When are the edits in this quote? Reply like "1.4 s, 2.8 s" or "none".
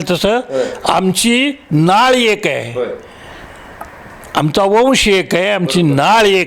none